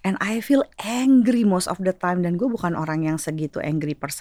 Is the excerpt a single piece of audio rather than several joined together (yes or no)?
yes